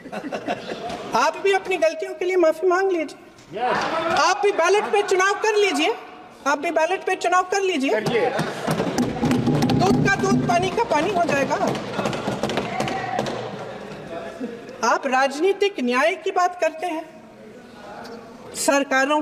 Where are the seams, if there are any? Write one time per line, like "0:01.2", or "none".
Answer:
none